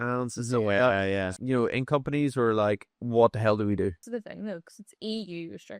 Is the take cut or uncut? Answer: cut